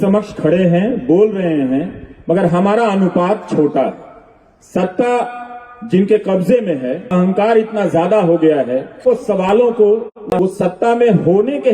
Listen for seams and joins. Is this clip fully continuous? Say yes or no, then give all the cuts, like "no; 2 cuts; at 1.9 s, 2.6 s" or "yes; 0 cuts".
no; 2 cuts; at 7.1 s, 9.0 s